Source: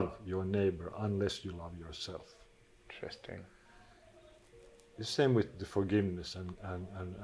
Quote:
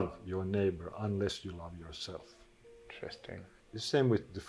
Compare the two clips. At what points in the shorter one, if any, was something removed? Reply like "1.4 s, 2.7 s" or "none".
3.6 s